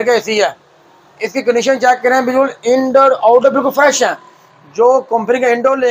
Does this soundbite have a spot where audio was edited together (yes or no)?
no